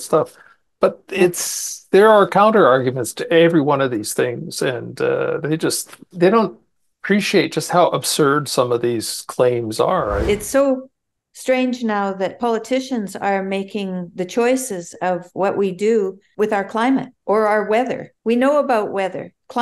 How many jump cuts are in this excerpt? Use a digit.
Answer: 5